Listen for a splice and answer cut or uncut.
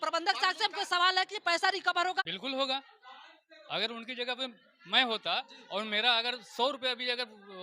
cut